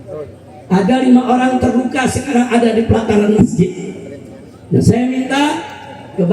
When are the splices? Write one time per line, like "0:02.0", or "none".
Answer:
none